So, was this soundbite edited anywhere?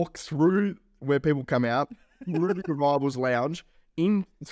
no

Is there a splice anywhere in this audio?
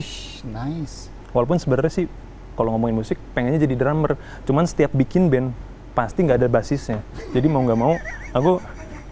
no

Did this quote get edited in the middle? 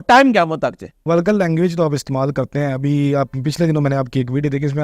yes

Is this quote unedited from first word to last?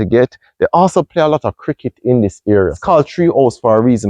no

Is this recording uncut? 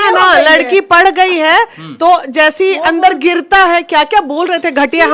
yes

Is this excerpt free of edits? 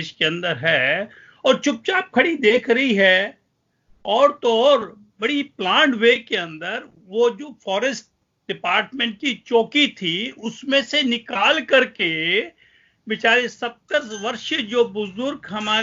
yes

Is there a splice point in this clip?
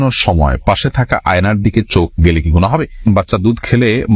yes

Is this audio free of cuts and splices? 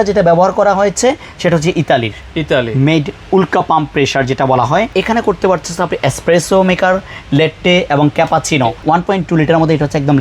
no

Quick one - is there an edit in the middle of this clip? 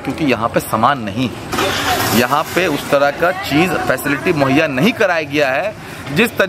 no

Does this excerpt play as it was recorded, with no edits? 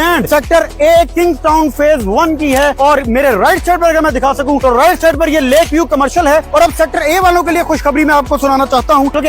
yes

